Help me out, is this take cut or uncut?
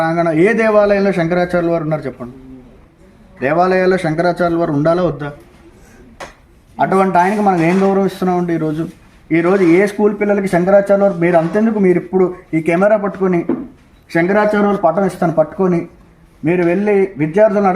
cut